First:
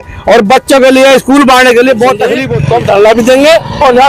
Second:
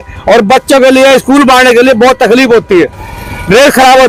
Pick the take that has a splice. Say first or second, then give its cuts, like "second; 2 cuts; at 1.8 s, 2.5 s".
first; 1 cut; at 2.5 s